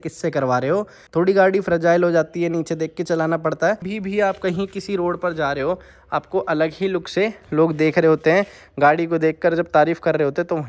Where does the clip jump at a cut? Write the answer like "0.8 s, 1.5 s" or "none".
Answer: 1.0 s, 3.9 s